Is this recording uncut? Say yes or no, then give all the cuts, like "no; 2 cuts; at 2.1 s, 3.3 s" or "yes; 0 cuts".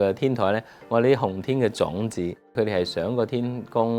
no; 1 cut; at 2.6 s